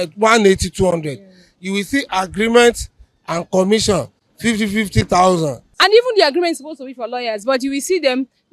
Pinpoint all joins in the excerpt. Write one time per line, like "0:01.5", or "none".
0:05.6

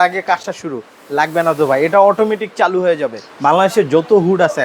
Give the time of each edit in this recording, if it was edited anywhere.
0:03.3

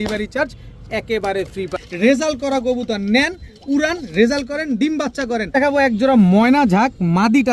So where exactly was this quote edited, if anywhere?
0:01.8
0:05.5

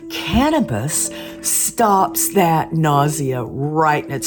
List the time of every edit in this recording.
none

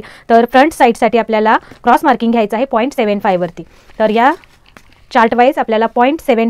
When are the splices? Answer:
none

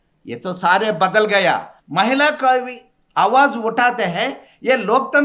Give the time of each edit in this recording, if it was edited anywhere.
0:01.7

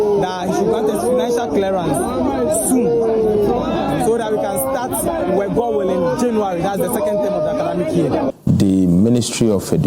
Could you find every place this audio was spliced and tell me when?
0:08.3

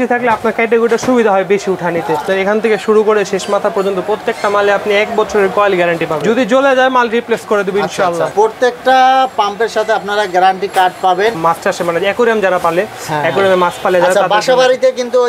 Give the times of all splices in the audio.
0:02.2
0:08.3
0:11.4

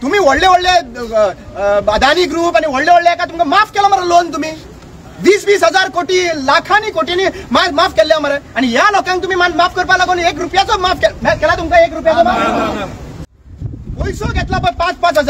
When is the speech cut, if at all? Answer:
0:13.1

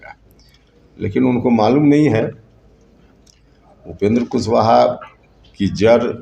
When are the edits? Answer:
none

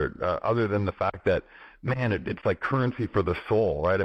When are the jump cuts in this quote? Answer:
none

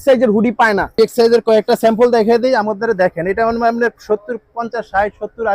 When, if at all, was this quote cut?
0:01.0

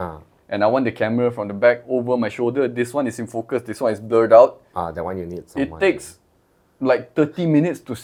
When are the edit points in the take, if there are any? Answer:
none

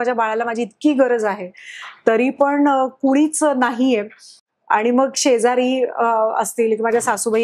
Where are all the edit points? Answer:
none

